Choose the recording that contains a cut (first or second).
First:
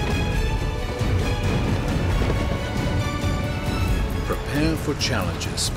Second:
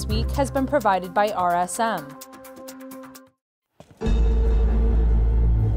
second